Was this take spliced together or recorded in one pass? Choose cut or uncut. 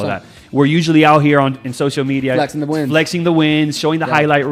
uncut